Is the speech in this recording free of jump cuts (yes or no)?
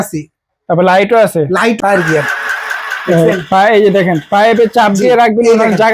no